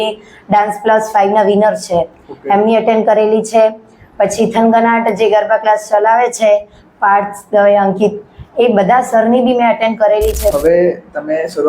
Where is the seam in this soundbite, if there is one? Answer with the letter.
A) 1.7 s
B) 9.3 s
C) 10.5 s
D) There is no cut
C